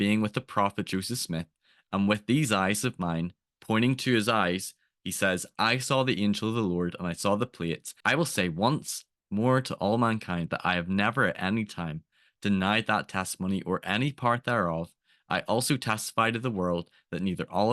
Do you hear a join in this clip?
yes; 1 cut; at 7.9 s

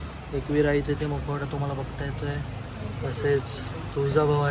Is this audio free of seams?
yes; 0 cuts

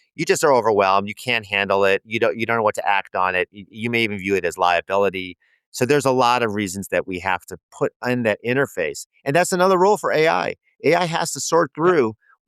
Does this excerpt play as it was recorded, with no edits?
yes; 0 cuts

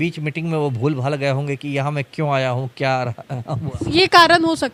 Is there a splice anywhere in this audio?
no; 0 cuts

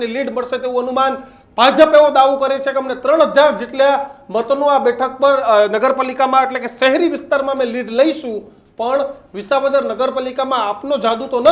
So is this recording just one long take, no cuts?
yes; 0 cuts

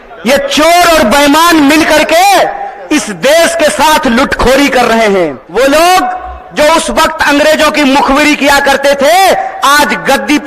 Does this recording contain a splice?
yes; 1 cut; at 5.4 s

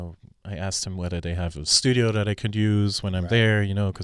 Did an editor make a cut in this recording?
no; 0 cuts

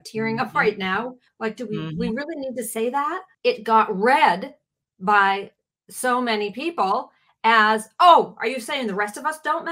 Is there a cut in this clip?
yes; 2 cuts; at 1.3 s, 3.3 s

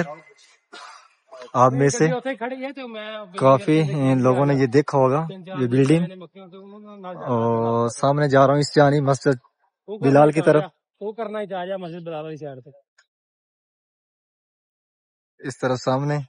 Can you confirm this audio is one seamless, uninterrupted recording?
yes; 0 cuts

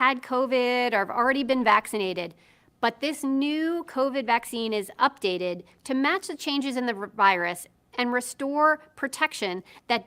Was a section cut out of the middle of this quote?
yes; 1 cut; at 7.3 s

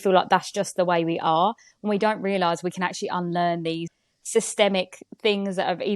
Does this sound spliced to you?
yes; 1 cut; at 3.9 s

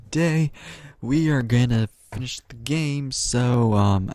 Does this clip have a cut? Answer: no; 0 cuts

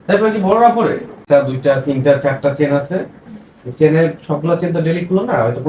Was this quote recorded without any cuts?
no; 1 cut; at 1.2 s

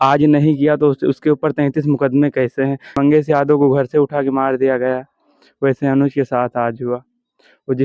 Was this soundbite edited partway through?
yes; 1 cut; at 3.0 s

